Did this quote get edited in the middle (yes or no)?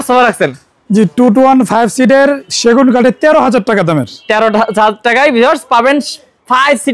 no